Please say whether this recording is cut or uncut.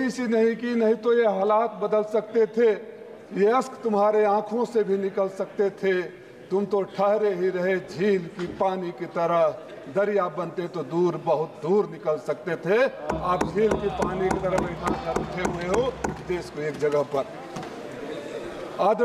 uncut